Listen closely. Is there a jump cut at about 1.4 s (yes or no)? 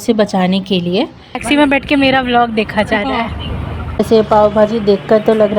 yes